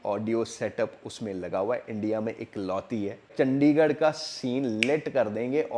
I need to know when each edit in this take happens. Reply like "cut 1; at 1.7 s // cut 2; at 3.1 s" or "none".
cut 1; at 3.3 s

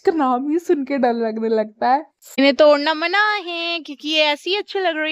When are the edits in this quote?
cut 1; at 2.4 s

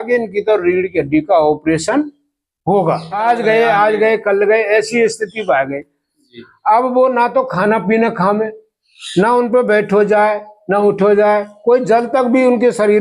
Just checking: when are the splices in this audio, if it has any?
cut 1; at 3.2 s

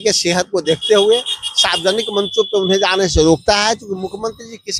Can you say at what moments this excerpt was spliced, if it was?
none

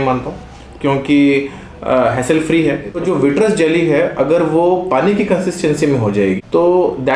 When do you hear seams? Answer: cut 1; at 3.0 s

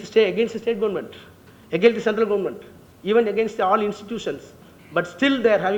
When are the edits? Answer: none

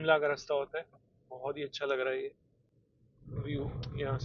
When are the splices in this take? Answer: none

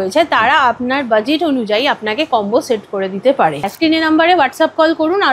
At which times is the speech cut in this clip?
cut 1; at 3.7 s

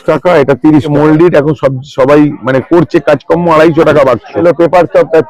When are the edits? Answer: cut 1; at 0.9 s // cut 2; at 4.4 s

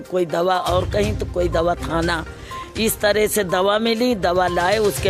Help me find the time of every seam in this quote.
none

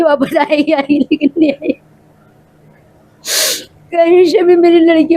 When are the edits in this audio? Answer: none

